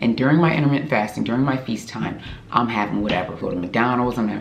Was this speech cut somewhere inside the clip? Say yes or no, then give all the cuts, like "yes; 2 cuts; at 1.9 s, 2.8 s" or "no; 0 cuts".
yes; 1 cut; at 3.4 s